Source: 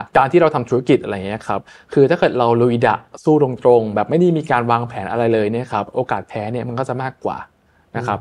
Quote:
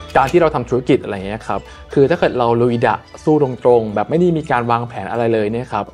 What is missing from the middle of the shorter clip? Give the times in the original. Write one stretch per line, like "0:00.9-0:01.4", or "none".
none